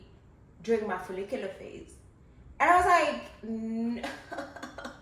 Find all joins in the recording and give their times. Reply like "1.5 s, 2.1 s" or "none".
3.3 s